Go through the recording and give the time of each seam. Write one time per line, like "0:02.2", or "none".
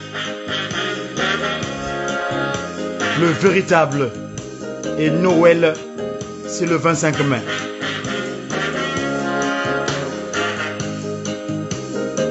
none